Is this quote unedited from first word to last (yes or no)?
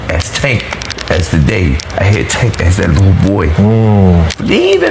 yes